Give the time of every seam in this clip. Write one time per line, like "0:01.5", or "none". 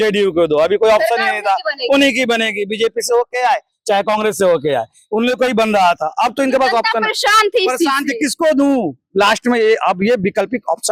none